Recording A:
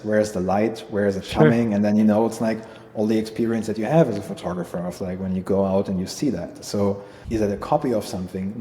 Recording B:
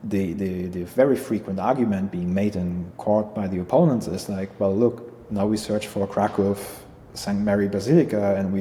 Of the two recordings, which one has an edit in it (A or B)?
A